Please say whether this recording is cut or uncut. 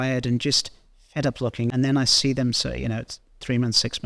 cut